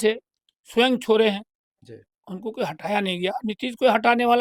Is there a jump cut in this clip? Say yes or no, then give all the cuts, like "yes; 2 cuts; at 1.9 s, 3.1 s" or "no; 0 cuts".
no; 0 cuts